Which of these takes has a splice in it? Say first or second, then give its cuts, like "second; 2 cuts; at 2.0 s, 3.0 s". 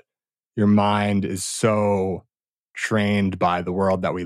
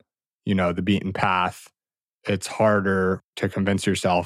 second; 1 cut; at 3.3 s